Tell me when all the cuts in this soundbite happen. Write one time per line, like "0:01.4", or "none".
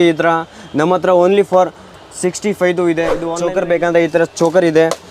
0:03.2